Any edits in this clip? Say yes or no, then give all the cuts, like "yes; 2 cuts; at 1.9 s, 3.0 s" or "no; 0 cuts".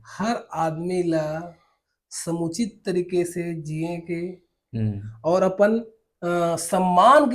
no; 0 cuts